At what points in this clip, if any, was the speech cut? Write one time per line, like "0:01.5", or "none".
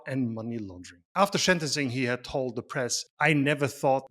0:01.1

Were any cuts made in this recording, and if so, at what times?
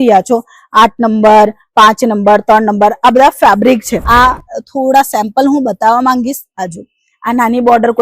0:03.9

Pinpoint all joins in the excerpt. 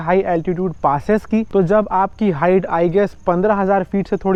none

